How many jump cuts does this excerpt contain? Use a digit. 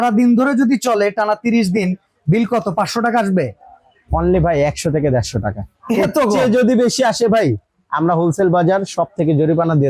0